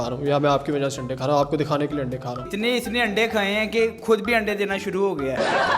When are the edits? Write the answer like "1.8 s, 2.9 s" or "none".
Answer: 2.5 s